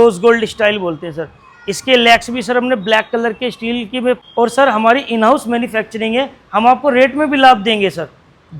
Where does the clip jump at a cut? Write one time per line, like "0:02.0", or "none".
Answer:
0:04.2